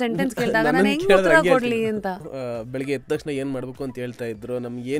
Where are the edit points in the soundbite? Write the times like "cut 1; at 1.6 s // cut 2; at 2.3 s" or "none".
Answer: cut 1; at 2.3 s